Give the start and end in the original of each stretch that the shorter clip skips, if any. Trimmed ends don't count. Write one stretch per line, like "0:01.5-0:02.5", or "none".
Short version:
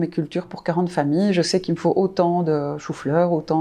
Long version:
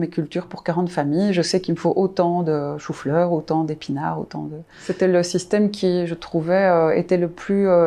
none